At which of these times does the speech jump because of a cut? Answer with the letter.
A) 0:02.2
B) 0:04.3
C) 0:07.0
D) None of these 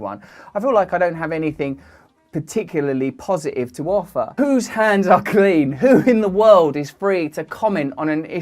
B